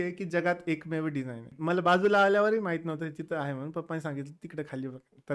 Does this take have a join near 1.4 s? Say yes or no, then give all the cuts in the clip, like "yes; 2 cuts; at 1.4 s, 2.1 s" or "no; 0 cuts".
yes; 1 cut; at 1.4 s